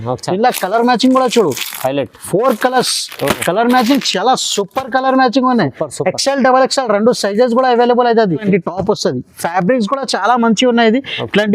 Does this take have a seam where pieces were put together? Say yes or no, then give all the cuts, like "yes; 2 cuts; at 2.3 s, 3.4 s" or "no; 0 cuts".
yes; 1 cut; at 8.4 s